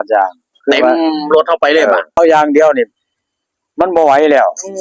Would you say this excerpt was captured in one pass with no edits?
no; 1 cut; at 2.2 s

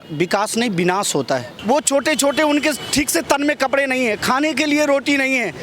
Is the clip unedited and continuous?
no; 1 cut; at 1.5 s

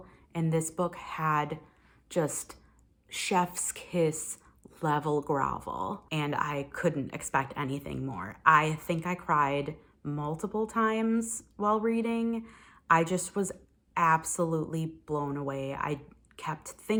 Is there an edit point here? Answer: no; 0 cuts

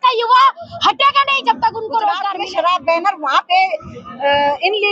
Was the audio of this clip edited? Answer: yes; 1 cut; at 2.4 s

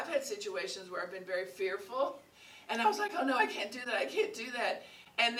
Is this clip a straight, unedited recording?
yes; 0 cuts

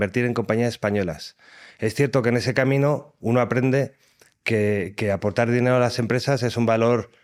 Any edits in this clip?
no; 0 cuts

